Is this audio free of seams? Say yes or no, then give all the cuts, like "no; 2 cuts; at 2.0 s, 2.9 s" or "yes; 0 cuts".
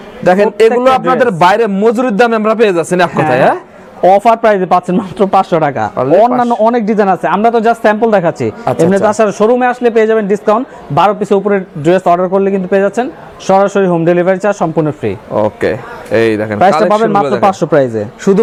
yes; 0 cuts